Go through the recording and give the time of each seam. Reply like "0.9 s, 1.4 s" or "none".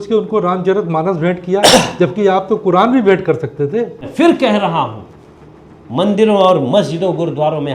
4.0 s